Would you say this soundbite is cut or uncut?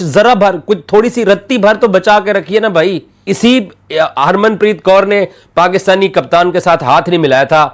cut